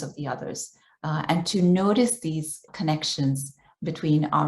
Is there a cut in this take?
yes; 1 cut; at 2.7 s

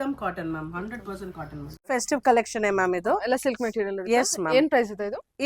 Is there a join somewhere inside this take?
yes; 1 cut; at 1.9 s

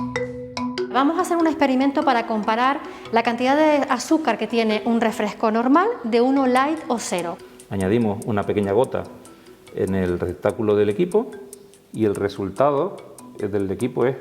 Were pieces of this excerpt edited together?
yes; 2 cuts; at 0.9 s, 7.3 s

